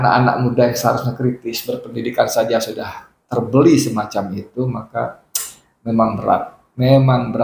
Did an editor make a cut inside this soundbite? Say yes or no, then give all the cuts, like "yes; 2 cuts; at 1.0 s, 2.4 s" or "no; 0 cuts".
no; 0 cuts